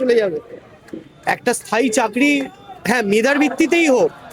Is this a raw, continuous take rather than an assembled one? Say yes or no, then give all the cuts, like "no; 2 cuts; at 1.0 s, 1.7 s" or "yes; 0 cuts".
yes; 0 cuts